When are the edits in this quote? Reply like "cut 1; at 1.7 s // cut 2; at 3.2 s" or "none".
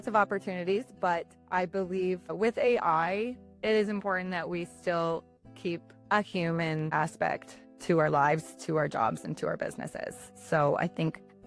none